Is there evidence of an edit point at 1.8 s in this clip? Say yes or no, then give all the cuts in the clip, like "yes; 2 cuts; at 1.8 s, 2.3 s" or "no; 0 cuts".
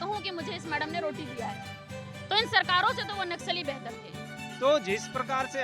no; 1 cut; at 4.0 s